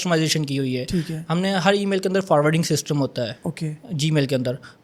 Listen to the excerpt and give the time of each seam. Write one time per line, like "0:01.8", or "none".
none

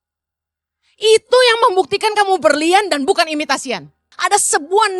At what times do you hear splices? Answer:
0:04.0

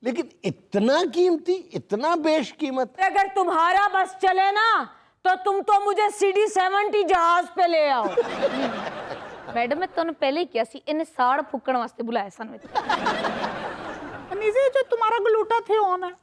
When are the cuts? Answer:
0:03.0
0:14.1

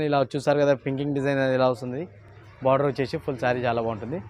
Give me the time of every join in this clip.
none

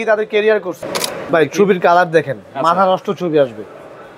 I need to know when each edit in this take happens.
0:01.0

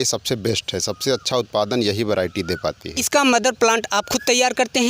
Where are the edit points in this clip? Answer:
0:02.9

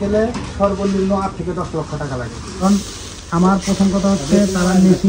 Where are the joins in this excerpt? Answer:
0:02.6

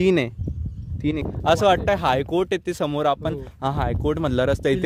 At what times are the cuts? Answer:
0:01.3

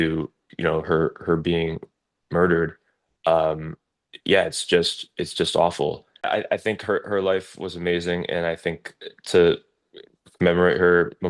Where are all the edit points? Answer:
0:06.3

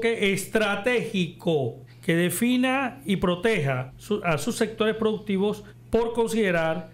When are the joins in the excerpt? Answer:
0:01.9
0:03.9
0:05.7

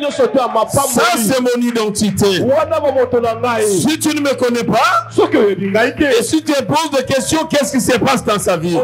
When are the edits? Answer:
none

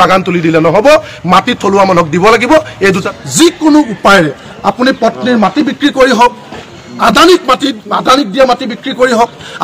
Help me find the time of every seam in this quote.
0:03.0

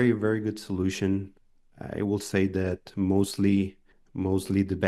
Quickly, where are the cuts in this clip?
none

